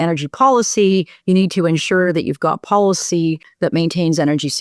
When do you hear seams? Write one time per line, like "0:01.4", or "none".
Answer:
0:03.5